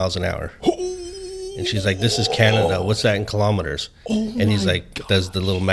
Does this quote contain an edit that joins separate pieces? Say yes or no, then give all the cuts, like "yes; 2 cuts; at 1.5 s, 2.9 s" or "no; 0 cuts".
no; 0 cuts